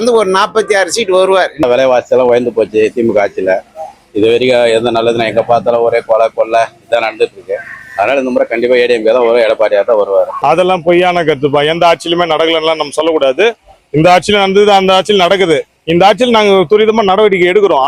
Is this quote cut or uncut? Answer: cut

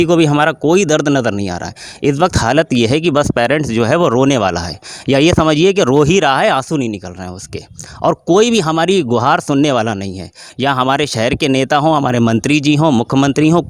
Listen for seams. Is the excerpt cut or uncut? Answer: uncut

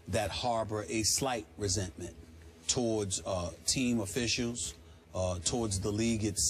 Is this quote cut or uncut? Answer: cut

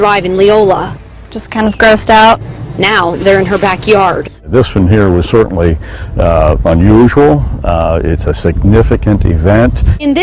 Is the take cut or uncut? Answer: cut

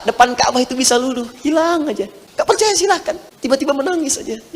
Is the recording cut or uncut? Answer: cut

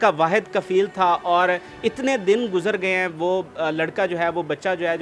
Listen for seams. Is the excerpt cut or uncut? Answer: uncut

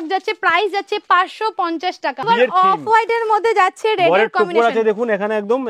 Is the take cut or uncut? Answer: cut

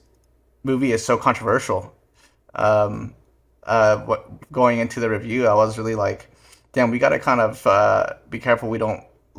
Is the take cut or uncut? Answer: uncut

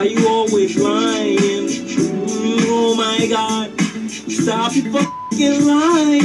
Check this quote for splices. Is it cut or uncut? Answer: uncut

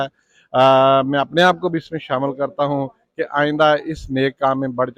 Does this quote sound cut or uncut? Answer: uncut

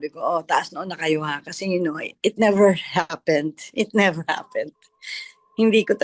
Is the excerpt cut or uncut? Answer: uncut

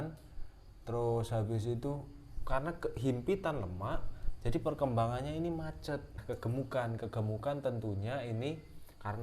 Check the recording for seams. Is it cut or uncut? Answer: cut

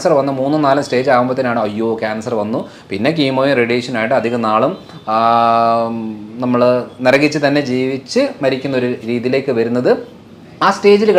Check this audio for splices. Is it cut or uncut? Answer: uncut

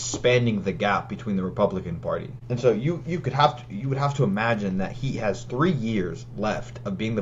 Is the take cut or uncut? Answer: cut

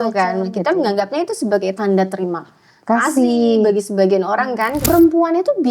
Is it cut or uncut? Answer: cut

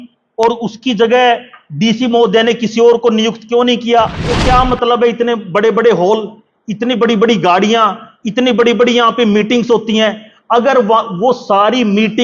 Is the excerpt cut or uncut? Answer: cut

